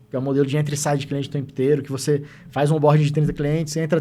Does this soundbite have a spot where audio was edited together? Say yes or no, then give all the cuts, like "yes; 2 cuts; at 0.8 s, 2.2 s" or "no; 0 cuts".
no; 0 cuts